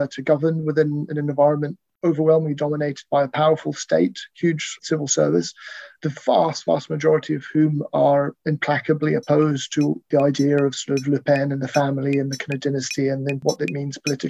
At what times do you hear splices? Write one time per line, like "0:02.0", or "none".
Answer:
0:04.8
0:05.8
0:10.0
0:13.4